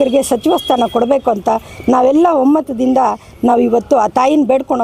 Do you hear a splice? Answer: no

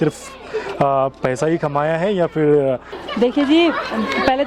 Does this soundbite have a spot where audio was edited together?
no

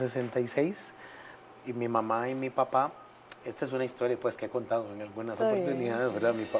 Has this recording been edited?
yes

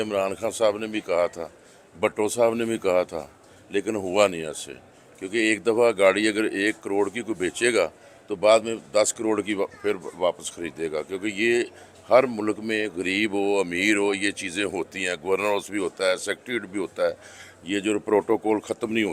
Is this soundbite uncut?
yes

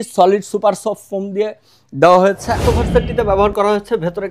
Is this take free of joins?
no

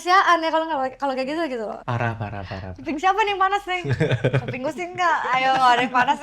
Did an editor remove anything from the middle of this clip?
yes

